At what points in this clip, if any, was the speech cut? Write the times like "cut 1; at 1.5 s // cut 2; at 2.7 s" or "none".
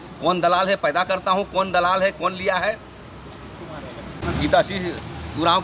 cut 1; at 4.2 s